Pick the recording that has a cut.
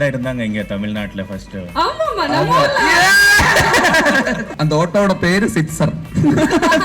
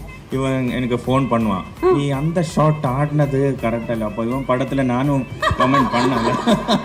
first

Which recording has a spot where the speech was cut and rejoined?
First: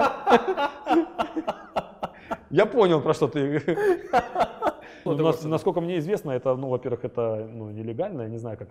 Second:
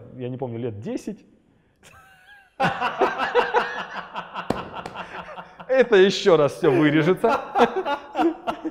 first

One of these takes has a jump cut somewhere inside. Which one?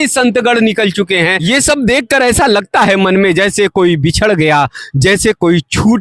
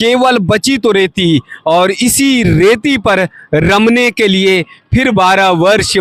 first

